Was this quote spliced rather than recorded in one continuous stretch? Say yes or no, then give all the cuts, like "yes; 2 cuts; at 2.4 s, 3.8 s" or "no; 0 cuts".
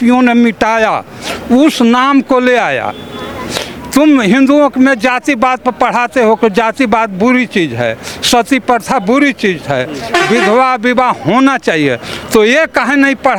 no; 0 cuts